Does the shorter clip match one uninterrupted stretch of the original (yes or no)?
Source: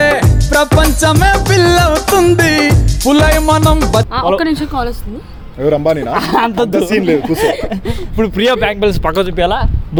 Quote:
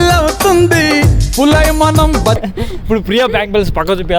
no